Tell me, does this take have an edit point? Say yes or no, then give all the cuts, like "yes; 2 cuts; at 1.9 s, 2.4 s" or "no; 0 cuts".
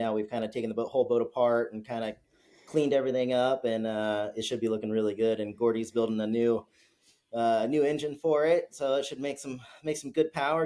no; 0 cuts